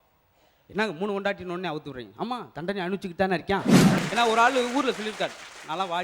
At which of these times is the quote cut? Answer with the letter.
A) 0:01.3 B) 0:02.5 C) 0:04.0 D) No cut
C